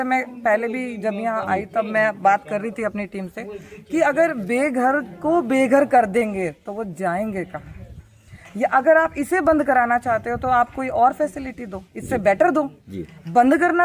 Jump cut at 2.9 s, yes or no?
no